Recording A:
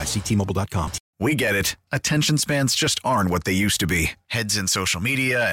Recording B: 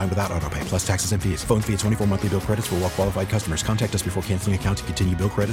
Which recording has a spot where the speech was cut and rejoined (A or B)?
A